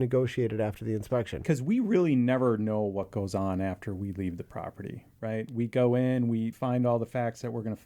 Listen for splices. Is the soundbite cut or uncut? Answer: cut